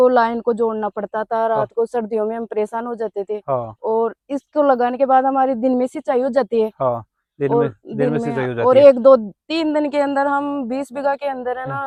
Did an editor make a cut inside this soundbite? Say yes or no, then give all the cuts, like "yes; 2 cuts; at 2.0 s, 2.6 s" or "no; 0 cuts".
no; 0 cuts